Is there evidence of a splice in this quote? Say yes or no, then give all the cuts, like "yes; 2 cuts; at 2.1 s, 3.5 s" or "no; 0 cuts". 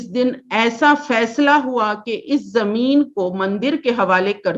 no; 0 cuts